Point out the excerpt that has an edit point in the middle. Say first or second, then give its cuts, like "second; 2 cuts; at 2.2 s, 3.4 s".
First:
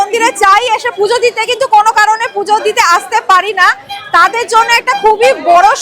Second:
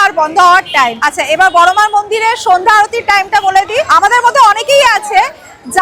second; 2 cuts; at 1.0 s, 3.9 s